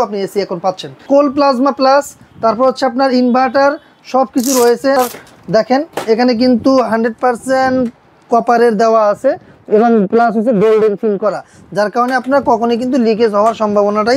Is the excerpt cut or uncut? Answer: cut